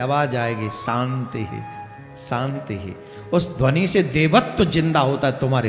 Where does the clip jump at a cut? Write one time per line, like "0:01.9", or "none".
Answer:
none